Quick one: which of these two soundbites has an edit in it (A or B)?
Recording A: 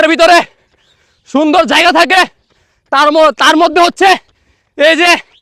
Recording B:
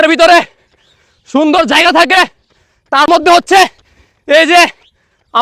B